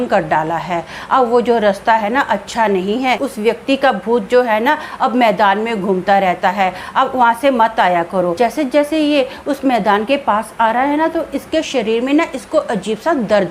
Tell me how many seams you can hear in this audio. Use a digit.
2